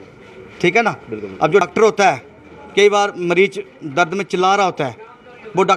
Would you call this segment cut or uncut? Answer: cut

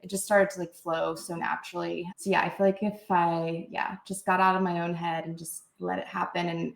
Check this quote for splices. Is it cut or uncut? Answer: cut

